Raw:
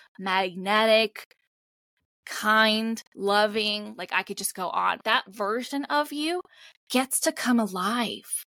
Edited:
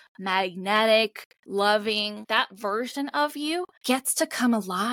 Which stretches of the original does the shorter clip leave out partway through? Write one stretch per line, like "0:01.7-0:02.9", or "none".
0:01.4-0:03.1
0:03.9-0:05.0
0:06.5-0:06.8